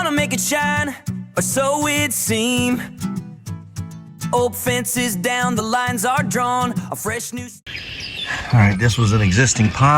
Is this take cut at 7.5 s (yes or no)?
yes